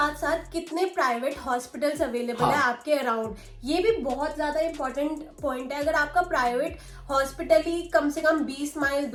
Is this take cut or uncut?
uncut